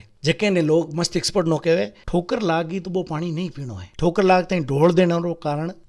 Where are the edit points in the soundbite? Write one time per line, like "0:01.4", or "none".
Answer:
0:02.0
0:03.9

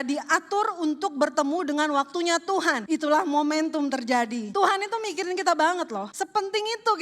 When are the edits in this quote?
0:02.8
0:04.5
0:06.1

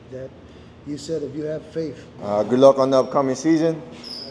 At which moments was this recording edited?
0:02.1

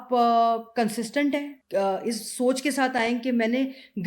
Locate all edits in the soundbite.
0:01.6

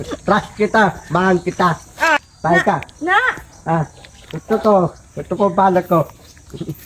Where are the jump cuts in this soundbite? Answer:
0:02.2

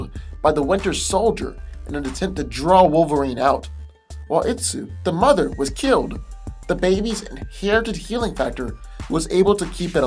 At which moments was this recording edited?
0:06.8

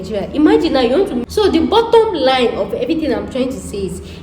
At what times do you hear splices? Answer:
0:01.2

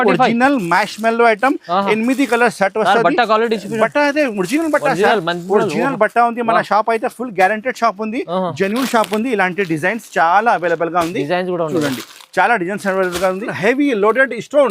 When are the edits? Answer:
0:13.5

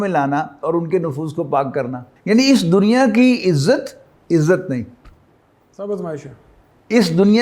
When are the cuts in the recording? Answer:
0:02.1

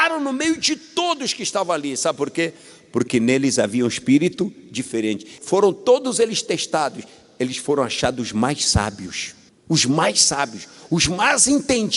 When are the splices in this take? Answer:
0:05.3

